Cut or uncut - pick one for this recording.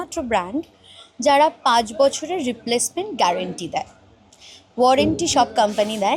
uncut